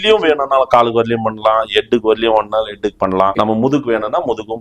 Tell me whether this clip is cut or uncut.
cut